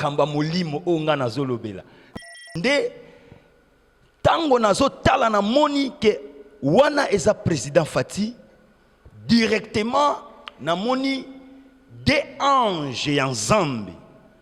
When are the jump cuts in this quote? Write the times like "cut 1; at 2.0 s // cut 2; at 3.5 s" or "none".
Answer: cut 1; at 2.0 s